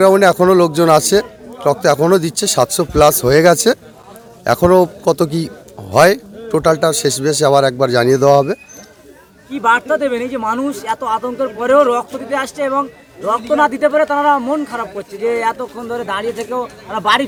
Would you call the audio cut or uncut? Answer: uncut